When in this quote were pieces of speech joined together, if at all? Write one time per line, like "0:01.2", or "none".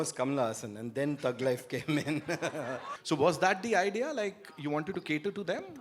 0:02.9